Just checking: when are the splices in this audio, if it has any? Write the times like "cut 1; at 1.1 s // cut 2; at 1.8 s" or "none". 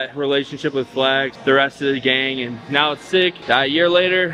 cut 1; at 1.3 s // cut 2; at 3.4 s